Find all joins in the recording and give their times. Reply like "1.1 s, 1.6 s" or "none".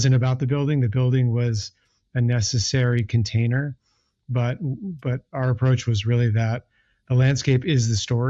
none